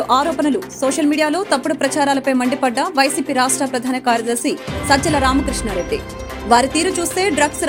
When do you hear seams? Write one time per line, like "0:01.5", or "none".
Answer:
none